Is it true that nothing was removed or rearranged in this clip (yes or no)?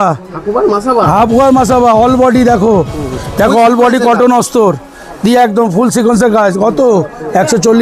yes